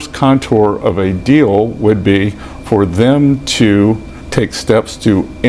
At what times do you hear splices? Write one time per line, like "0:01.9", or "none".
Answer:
0:04.1